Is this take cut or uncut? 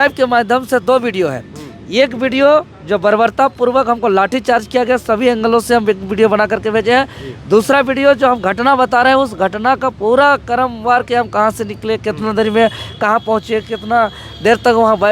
uncut